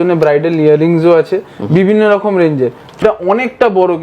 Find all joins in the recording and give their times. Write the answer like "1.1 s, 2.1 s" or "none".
2.9 s